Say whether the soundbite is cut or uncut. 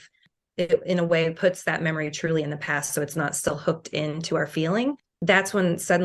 uncut